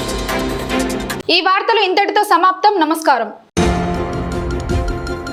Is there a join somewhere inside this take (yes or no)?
no